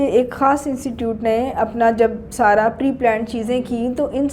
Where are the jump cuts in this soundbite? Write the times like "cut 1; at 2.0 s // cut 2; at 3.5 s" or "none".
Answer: none